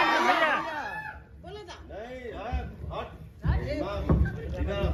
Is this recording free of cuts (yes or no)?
yes